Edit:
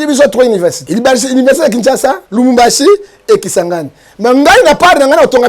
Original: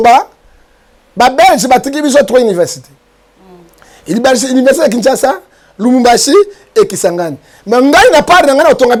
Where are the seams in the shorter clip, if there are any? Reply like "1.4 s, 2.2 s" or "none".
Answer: 0.8 s, 2.2 s